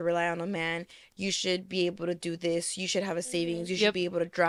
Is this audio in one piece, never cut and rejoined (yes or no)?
yes